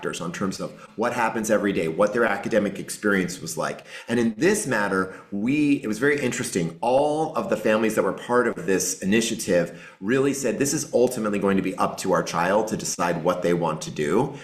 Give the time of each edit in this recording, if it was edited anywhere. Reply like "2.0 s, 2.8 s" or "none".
none